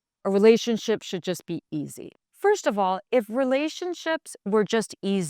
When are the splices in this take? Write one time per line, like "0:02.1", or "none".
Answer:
0:02.2